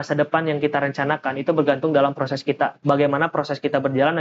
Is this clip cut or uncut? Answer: cut